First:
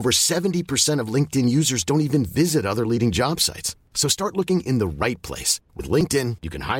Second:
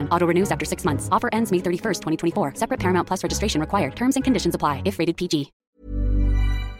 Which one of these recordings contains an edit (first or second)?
second